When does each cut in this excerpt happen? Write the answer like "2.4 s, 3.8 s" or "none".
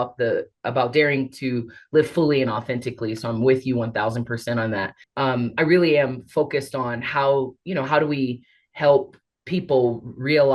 5.0 s